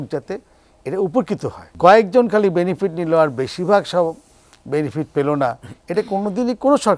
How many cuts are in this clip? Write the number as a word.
one